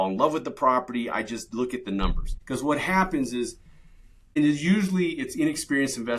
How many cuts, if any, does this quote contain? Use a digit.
2